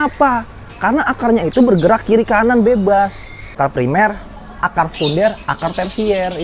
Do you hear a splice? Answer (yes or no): yes